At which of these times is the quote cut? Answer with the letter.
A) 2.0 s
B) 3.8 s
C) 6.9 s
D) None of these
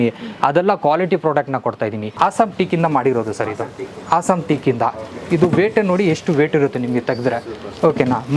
A